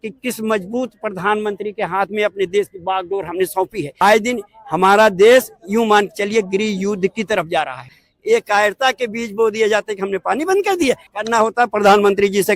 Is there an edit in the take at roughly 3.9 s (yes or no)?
yes